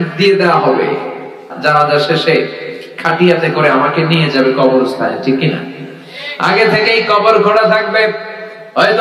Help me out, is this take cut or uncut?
cut